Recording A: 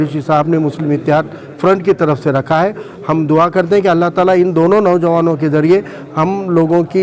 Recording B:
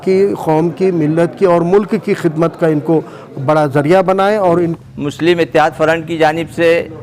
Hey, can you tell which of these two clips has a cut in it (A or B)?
B